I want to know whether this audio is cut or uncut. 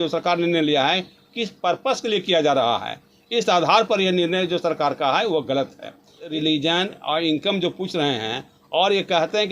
cut